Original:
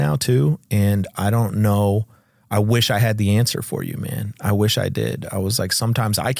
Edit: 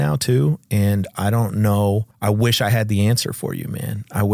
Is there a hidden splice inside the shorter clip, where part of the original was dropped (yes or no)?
yes